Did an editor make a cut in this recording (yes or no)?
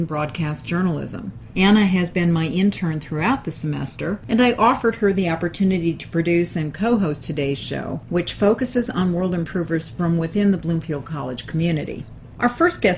yes